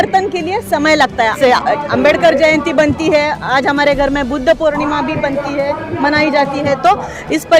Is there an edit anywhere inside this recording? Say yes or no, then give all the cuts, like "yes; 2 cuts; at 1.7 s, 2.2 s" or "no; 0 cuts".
yes; 1 cut; at 1.4 s